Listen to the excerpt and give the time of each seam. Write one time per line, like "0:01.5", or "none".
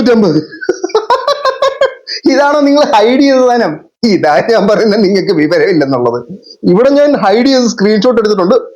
none